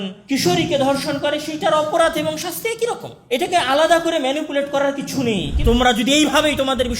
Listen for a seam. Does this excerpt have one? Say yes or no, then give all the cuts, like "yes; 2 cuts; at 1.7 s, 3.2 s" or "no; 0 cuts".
yes; 1 cut; at 5.5 s